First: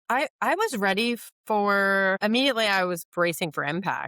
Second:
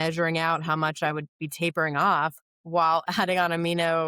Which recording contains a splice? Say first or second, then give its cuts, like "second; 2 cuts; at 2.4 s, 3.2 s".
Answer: first; 2 cuts; at 1.3 s, 2.2 s